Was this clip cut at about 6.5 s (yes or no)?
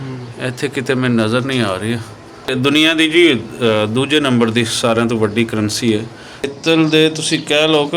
yes